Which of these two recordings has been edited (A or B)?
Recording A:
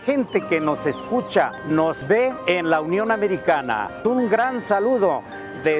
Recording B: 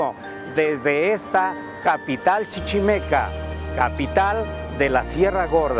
A